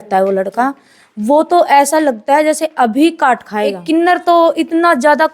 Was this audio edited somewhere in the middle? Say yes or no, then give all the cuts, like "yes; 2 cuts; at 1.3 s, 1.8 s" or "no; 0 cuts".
yes; 1 cut; at 3.8 s